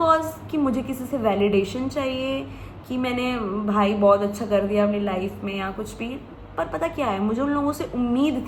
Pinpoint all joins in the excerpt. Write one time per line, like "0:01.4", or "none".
none